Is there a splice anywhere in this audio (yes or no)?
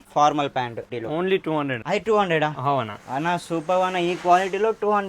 yes